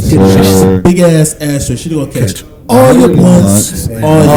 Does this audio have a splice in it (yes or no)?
no